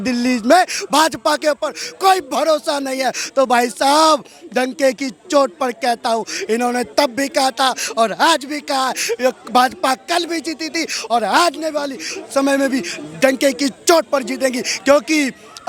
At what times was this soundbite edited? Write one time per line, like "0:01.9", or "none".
none